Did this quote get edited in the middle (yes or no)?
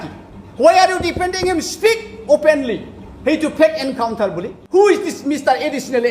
yes